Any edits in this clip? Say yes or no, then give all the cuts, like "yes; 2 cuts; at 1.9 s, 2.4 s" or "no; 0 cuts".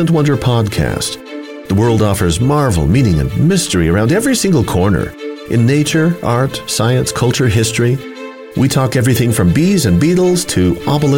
no; 0 cuts